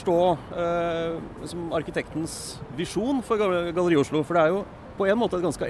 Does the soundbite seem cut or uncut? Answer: cut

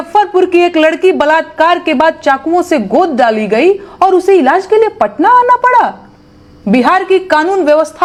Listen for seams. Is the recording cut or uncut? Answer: uncut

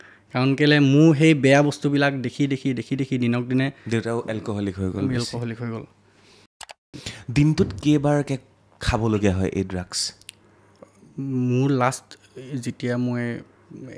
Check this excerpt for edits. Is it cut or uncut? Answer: cut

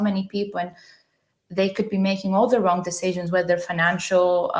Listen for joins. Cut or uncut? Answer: uncut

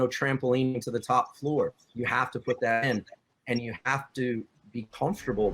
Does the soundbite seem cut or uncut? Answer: uncut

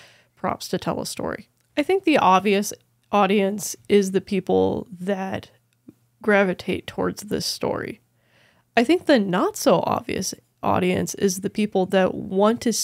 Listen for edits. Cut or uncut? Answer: cut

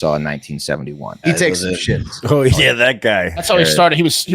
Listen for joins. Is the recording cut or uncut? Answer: cut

